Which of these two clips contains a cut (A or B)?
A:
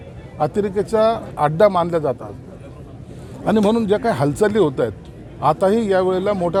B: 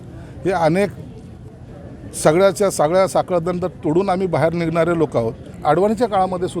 B